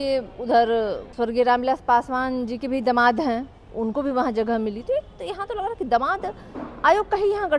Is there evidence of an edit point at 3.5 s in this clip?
no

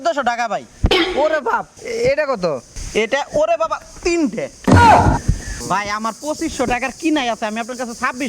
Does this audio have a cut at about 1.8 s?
yes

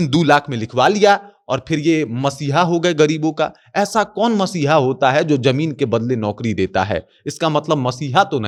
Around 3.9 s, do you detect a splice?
no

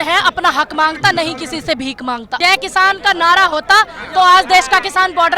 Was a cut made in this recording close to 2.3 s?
yes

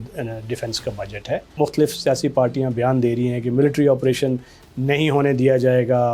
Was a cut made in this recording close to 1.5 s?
yes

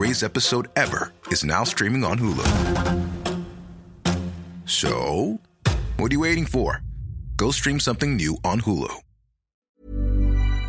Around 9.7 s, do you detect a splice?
yes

